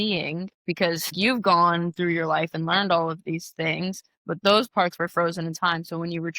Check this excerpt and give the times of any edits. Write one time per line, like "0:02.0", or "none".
0:01.1